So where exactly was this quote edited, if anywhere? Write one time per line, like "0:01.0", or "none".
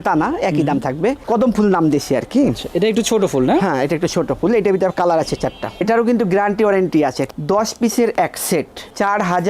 0:01.2
0:05.8
0:07.2